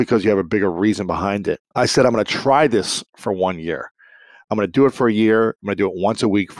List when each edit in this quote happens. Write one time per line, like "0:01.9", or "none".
0:01.6